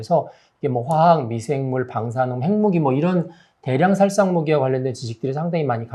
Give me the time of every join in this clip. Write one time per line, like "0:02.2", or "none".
none